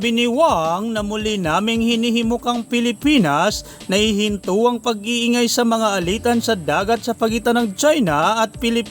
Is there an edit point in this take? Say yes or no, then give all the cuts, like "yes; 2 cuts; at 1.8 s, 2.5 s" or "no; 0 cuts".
no; 0 cuts